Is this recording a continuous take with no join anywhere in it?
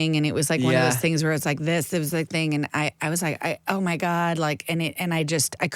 yes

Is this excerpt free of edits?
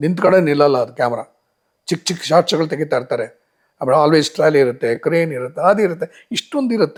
yes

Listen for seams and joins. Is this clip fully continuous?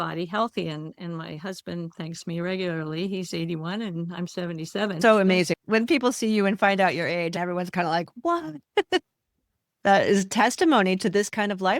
no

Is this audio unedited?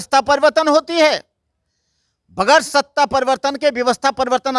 yes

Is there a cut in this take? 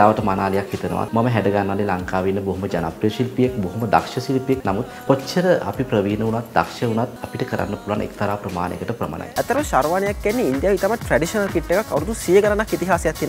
yes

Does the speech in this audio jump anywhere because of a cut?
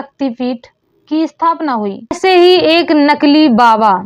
yes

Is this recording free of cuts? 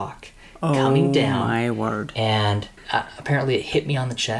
no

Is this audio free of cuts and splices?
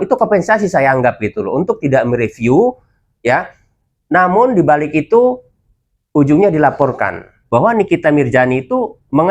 no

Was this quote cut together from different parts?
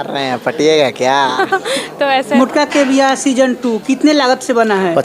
yes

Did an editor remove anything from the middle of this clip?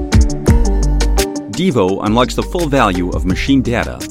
yes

